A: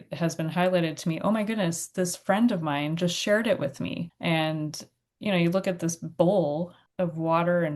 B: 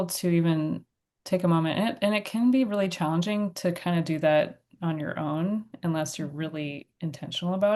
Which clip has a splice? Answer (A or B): A